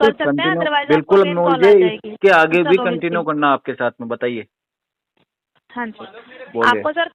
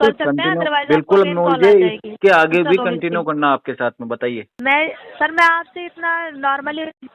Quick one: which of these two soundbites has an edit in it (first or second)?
second